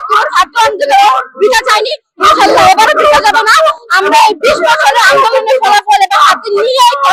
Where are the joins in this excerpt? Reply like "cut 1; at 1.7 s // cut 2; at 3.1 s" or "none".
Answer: none